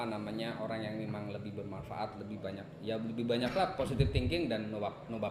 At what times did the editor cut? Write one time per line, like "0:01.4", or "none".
none